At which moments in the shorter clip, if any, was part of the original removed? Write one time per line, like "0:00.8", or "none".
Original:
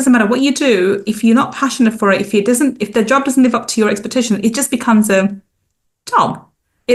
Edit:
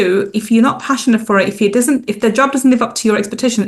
none